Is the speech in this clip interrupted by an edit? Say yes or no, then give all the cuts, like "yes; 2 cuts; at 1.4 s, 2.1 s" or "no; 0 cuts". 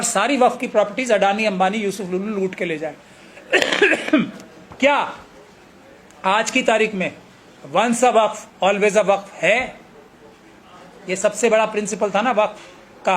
no; 0 cuts